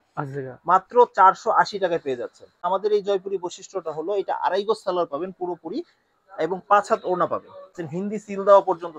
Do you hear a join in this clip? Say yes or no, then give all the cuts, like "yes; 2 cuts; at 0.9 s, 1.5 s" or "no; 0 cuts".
yes; 2 cuts; at 2.6 s, 7.8 s